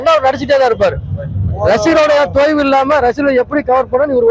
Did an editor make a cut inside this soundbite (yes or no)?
no